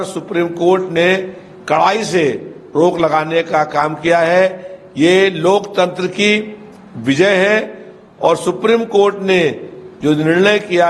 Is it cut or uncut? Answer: uncut